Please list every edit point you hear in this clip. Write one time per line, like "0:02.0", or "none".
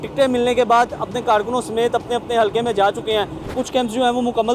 0:03.5